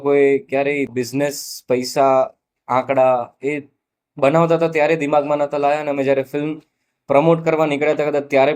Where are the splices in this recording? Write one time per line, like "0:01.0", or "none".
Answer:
none

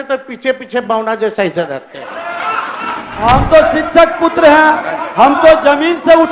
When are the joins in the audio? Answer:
0:03.1

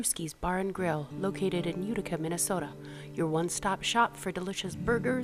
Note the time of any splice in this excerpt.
none

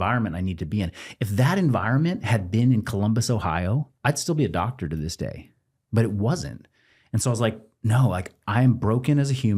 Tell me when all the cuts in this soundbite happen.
0:03.9

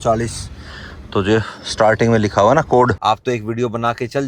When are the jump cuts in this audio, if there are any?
0:03.0

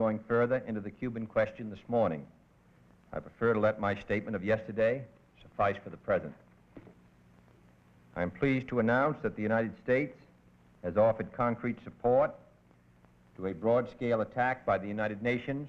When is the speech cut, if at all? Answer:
none

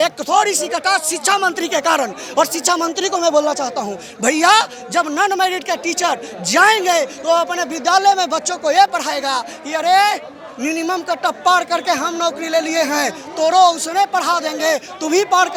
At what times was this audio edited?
none

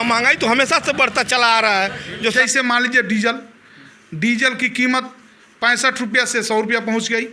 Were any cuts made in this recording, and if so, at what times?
0:02.3

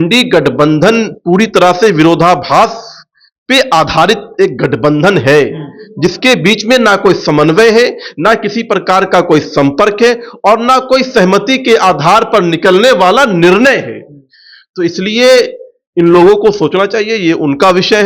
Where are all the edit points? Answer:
none

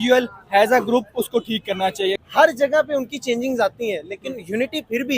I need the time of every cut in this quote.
0:02.2

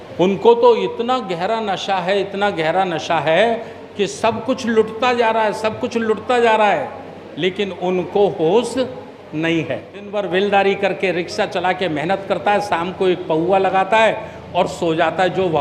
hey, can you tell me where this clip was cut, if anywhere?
0:10.2

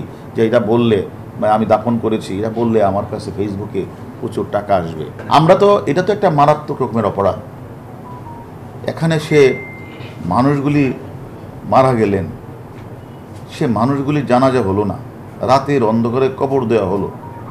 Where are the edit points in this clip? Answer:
0:05.1

